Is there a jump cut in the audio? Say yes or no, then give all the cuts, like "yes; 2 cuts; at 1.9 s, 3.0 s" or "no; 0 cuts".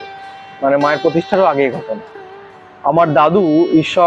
no; 0 cuts